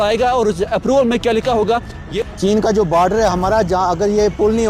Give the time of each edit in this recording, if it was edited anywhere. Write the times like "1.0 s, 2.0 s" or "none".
1.9 s